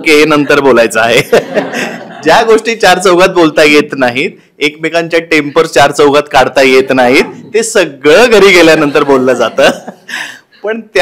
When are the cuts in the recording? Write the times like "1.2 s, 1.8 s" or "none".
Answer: none